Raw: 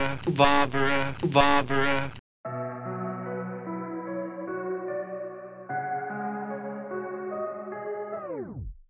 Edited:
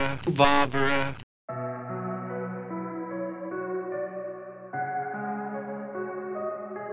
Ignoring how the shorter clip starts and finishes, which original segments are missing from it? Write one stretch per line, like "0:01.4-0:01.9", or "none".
0:01.1-0:02.1